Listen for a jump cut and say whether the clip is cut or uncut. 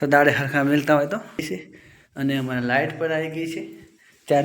cut